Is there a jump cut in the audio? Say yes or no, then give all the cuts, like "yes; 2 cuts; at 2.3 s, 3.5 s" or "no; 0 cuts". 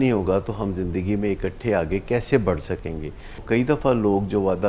yes; 1 cut; at 3.4 s